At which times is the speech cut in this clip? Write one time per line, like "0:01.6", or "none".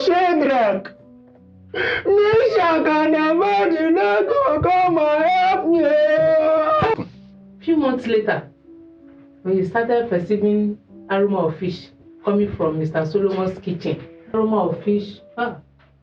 0:06.9
0:14.3